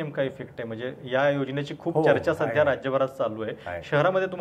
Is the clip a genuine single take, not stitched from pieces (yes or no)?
yes